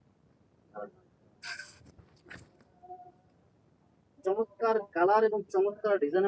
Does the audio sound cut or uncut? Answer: uncut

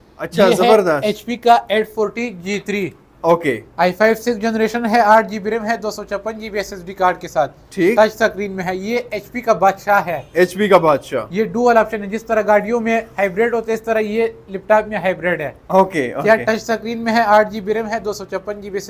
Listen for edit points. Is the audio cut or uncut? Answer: uncut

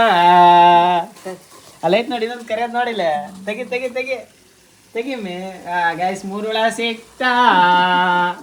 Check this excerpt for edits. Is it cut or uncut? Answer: uncut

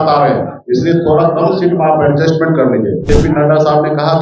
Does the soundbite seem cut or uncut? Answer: cut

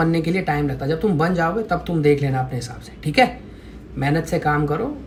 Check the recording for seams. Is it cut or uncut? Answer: uncut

